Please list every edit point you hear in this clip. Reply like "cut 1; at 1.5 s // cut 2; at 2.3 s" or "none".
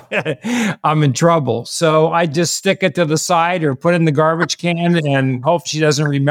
cut 1; at 2.3 s